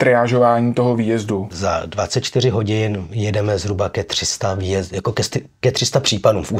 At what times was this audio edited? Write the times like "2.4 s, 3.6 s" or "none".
1.5 s